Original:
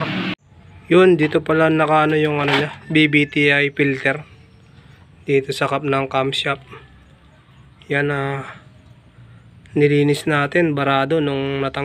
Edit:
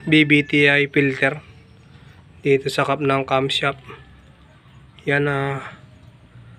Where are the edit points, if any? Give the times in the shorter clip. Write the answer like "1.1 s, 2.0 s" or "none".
none

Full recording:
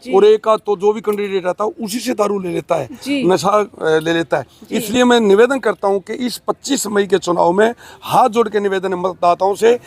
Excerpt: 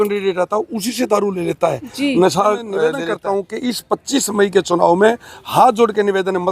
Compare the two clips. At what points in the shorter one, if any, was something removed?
2.9 s

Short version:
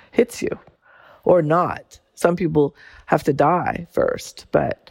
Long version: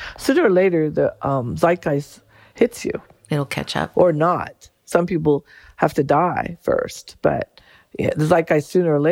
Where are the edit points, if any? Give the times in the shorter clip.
0.9 s

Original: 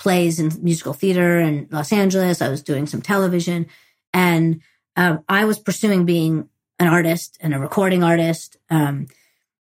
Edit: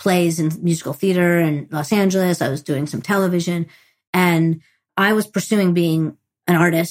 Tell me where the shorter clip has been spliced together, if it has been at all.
4.9 s

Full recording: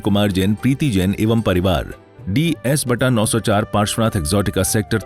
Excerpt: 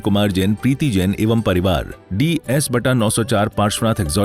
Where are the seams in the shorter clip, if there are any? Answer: 2.0 s

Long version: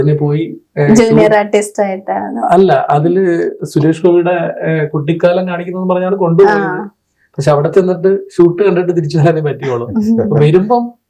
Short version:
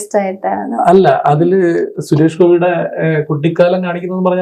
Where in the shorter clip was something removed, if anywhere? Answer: none

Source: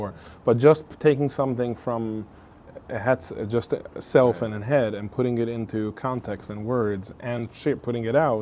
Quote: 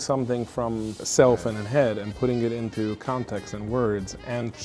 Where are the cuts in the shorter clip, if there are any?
1.0 s

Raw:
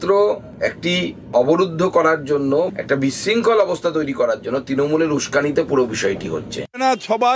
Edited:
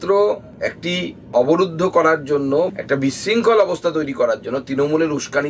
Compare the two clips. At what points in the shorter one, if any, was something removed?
none

